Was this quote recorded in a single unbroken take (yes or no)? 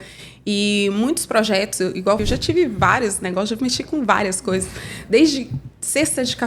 no